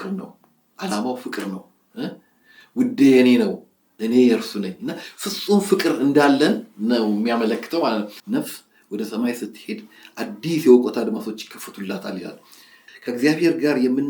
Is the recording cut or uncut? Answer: cut